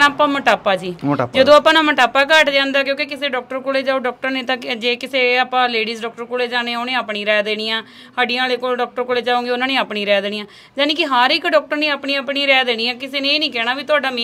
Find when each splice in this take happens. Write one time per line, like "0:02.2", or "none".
none